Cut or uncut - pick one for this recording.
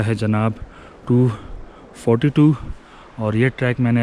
uncut